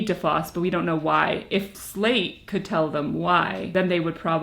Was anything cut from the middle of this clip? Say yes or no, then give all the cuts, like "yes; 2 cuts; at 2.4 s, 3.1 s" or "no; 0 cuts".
yes; 2 cuts; at 1.8 s, 3.6 s